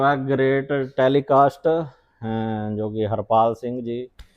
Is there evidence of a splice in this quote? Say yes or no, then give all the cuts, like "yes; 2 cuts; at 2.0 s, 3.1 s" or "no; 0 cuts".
no; 0 cuts